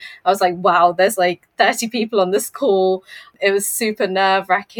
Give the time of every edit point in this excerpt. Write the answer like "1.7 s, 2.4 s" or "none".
3.3 s